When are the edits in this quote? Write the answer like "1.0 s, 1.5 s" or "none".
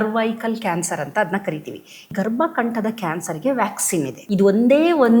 2.1 s, 4.2 s